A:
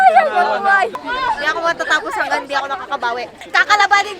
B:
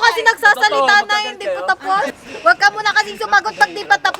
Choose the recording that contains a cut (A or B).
A